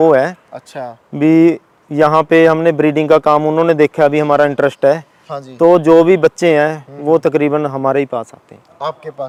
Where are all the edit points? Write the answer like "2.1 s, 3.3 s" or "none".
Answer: none